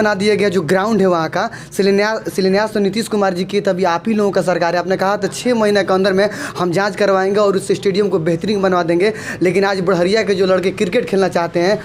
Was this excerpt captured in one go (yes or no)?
yes